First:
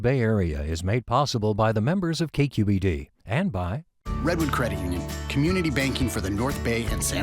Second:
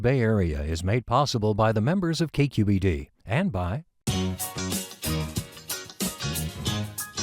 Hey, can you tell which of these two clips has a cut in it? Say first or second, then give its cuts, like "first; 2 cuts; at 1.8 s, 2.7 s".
first; 1 cut; at 3.9 s